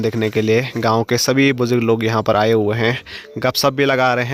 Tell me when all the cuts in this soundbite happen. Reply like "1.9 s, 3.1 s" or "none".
none